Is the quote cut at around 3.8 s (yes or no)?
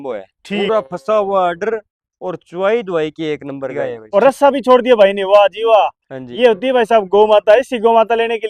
yes